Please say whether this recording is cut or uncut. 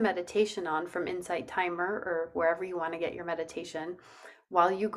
uncut